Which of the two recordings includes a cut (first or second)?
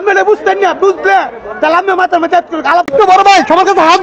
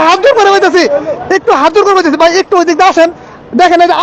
first